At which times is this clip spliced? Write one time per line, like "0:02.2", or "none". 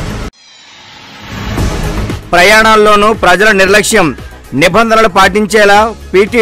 none